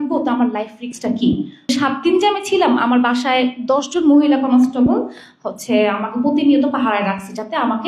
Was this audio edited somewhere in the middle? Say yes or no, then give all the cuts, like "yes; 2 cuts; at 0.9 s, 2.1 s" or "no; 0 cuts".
yes; 1 cut; at 1.7 s